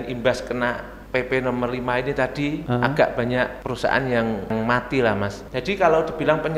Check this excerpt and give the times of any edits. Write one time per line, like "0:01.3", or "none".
0:00.9
0:02.6
0:03.6
0:04.5
0:05.4